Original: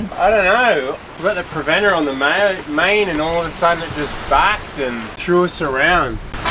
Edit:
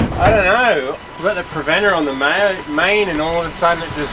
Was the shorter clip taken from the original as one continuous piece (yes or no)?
yes